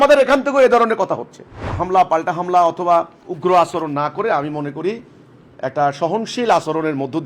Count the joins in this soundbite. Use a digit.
2